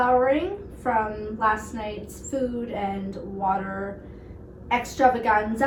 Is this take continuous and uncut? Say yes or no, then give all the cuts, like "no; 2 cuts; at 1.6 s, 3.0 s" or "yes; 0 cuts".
yes; 0 cuts